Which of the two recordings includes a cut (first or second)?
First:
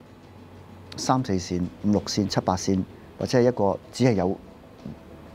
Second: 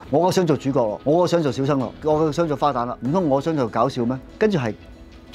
second